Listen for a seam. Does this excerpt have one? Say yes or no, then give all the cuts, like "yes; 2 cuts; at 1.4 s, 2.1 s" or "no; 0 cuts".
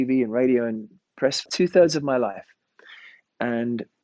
yes; 1 cut; at 1.5 s